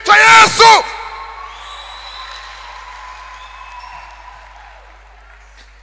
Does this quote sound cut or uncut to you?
uncut